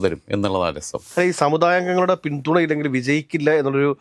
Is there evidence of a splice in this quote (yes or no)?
yes